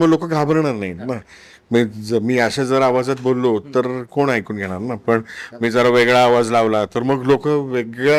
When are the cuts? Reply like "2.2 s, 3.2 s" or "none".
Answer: none